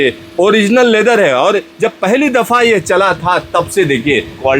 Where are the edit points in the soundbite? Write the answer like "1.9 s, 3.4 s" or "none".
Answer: none